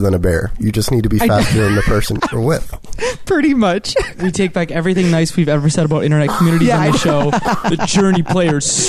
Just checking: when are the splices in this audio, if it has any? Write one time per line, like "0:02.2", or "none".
none